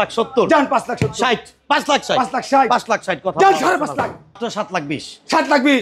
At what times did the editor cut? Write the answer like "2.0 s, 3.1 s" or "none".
4.4 s